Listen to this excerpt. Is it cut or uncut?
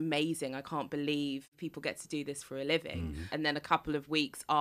cut